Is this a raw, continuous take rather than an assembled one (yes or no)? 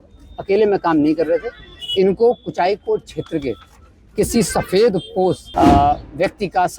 no